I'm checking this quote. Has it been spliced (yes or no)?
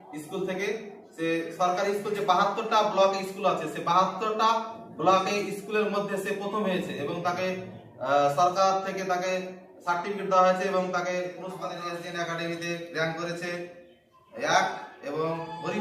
yes